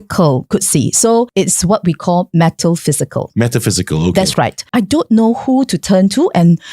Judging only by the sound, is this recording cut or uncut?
cut